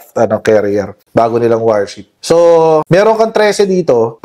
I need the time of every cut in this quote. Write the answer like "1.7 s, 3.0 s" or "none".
2.1 s, 2.8 s